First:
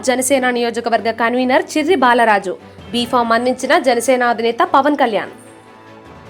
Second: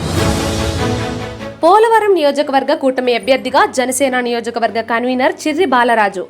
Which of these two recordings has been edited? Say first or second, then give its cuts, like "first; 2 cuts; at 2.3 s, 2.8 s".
second; 1 cut; at 1.3 s